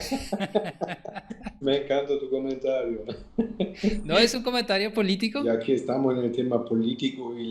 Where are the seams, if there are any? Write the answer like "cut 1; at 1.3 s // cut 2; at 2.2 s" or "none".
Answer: cut 1; at 5.5 s

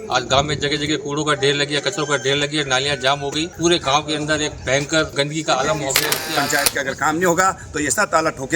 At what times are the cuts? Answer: cut 1; at 3.5 s // cut 2; at 5.1 s // cut 3; at 6.4 s

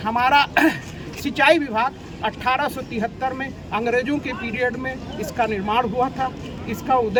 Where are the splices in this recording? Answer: none

